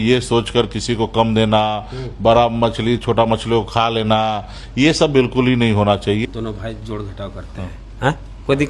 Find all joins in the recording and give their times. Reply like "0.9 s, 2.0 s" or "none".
6.2 s